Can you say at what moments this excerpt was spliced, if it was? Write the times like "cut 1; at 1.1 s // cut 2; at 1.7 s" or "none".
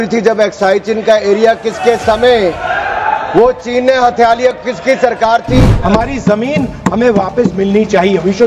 cut 1; at 5.7 s

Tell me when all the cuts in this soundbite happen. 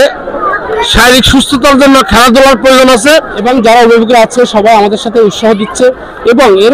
cut 1; at 3.3 s

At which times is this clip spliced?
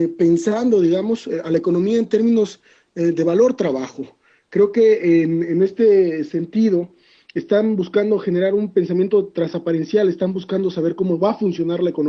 none

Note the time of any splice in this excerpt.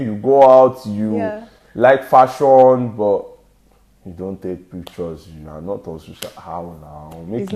none

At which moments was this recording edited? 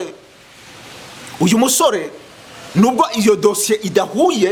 none

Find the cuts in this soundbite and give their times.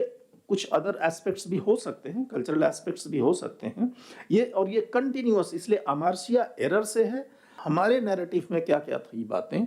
cut 1; at 7.5 s

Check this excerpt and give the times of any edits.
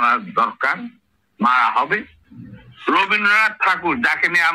cut 1; at 2.2 s

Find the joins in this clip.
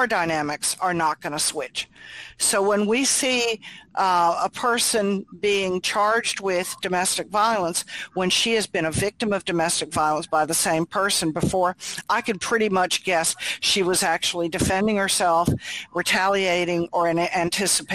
none

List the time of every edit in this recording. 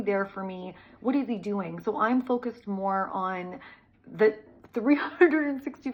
none

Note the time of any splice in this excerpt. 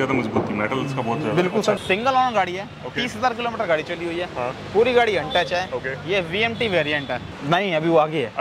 cut 1; at 1.8 s // cut 2; at 7.3 s

